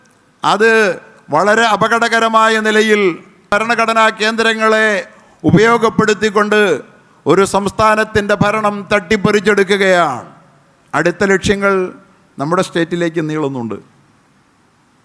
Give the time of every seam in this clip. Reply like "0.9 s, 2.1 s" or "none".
3.5 s